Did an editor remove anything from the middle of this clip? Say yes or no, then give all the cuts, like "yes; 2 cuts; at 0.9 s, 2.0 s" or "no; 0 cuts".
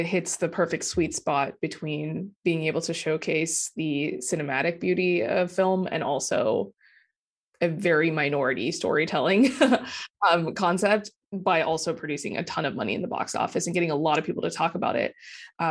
no; 0 cuts